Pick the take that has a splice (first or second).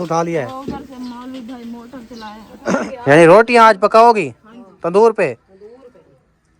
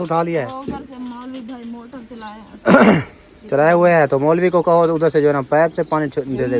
first